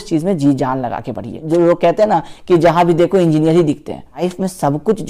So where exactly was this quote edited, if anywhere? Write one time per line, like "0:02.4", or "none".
0:01.4
0:04.2